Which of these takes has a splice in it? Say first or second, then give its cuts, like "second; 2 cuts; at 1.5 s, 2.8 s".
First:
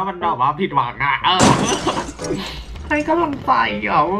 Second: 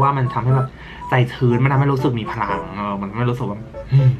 first; 1 cut; at 3.1 s